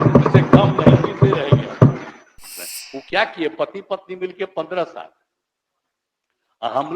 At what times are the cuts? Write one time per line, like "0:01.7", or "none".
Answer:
0:02.5